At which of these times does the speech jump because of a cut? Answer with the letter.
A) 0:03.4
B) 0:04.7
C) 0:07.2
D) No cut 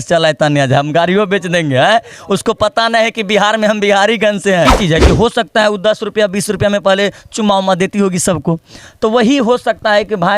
B